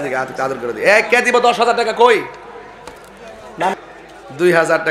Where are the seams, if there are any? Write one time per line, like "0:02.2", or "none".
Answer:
0:03.8